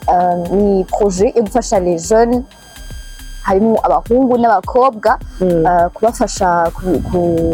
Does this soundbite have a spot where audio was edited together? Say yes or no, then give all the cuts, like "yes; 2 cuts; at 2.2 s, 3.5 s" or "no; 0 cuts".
no; 0 cuts